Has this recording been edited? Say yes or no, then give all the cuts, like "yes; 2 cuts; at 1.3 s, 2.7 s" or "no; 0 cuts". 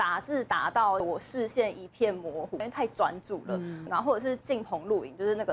yes; 3 cuts; at 1.0 s, 2.6 s, 3.8 s